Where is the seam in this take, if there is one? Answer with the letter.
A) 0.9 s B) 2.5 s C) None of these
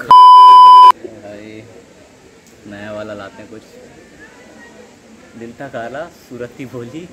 A